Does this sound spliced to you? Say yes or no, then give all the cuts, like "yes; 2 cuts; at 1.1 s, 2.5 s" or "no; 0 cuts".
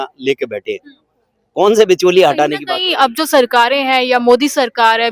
no; 0 cuts